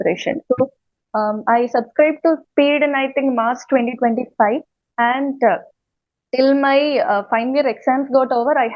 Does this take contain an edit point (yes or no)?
no